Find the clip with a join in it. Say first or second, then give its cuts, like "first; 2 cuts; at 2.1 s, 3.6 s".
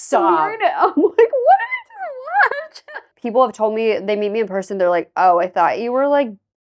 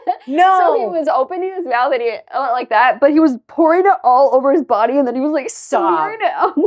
first; 1 cut; at 3.1 s